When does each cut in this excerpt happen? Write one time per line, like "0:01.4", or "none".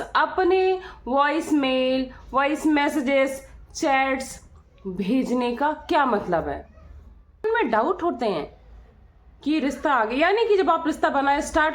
0:07.4